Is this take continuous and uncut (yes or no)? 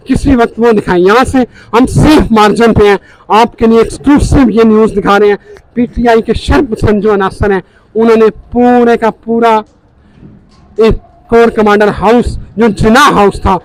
yes